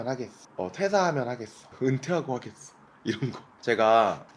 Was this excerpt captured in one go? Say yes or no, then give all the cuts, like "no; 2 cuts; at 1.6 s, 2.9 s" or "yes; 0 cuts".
yes; 0 cuts